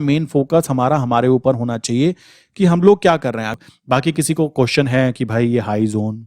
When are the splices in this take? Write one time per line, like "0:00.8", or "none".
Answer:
0:03.4